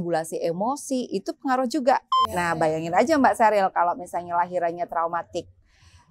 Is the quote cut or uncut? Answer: cut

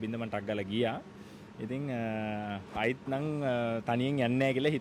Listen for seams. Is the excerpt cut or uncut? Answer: uncut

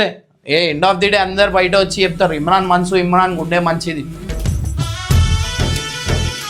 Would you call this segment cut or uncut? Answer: uncut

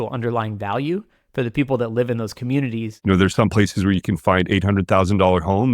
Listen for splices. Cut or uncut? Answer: cut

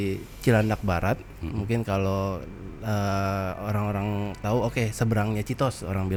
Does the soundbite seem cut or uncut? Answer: uncut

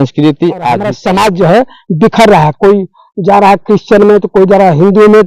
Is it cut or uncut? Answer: cut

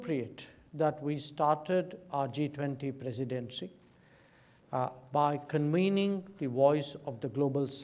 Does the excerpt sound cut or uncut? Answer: uncut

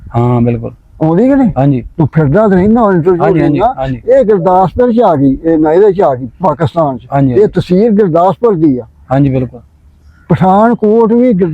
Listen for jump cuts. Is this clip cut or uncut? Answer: uncut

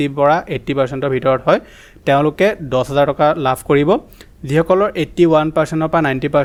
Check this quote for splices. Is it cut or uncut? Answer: uncut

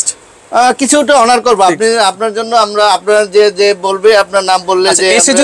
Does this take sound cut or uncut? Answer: uncut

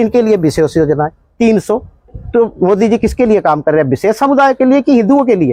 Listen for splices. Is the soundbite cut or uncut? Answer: uncut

